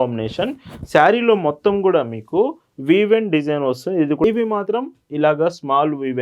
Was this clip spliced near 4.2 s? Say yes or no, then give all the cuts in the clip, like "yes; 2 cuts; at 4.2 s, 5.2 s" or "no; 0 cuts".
yes; 1 cut; at 4.2 s